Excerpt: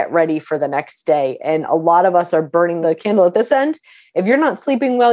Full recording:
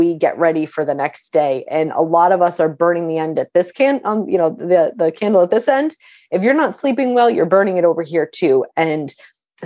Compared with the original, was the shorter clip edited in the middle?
yes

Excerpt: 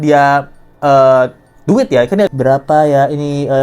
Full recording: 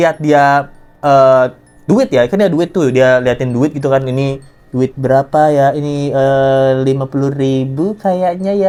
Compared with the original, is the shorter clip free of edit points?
no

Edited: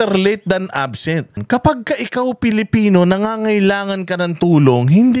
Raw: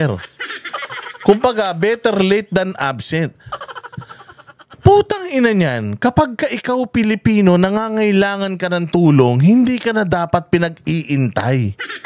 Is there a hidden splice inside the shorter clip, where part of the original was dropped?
yes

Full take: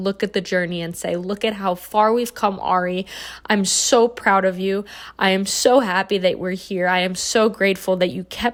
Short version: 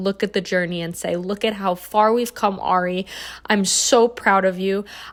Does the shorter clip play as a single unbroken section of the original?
yes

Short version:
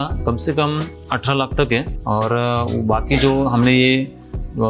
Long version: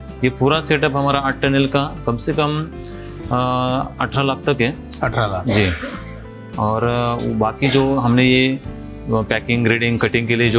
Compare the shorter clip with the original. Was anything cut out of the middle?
yes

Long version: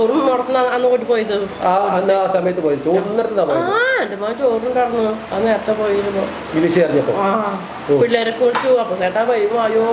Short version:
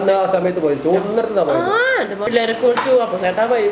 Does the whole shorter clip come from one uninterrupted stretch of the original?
no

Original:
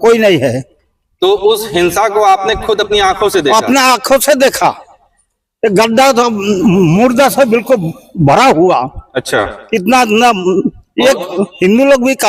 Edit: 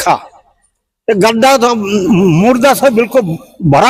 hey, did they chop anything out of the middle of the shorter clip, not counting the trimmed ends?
no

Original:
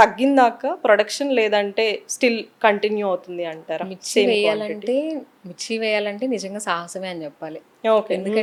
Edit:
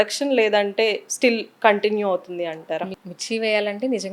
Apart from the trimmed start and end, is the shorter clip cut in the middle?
yes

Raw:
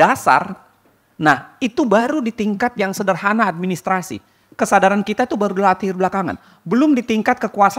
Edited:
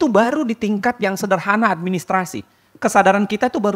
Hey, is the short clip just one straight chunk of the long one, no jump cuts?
yes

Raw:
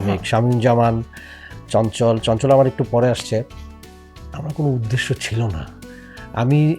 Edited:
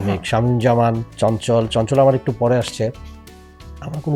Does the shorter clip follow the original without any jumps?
no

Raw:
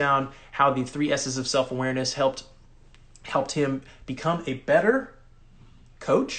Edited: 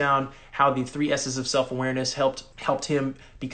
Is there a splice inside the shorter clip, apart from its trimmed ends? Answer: yes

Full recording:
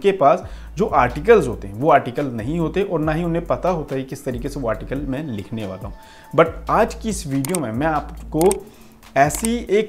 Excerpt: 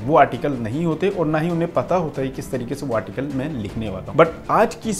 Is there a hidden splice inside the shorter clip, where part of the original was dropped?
yes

